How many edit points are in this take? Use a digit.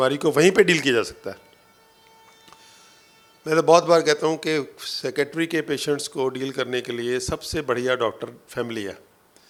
0